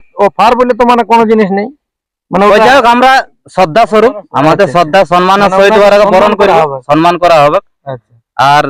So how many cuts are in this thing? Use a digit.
0